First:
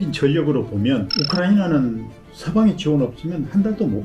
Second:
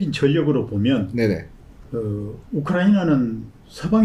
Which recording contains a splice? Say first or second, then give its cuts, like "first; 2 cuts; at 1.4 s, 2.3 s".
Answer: first; 1 cut; at 1.1 s